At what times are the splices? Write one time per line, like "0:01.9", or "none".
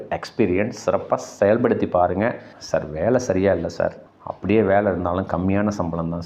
0:02.5